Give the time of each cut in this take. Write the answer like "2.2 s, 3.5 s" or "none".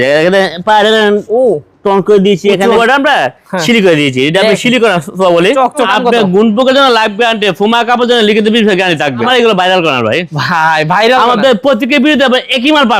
2.7 s, 5.8 s, 9.2 s